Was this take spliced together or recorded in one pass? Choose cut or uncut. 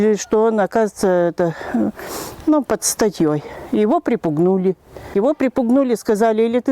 cut